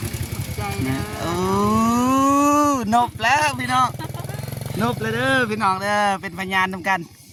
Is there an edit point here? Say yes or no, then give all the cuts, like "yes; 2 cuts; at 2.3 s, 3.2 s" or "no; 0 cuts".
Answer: no; 0 cuts